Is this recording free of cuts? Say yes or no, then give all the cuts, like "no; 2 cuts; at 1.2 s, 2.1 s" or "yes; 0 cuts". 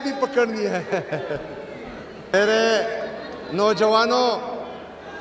no; 1 cut; at 2.1 s